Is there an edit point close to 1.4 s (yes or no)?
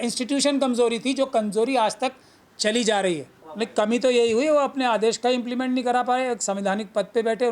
no